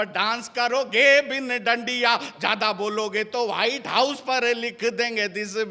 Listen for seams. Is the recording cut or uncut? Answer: uncut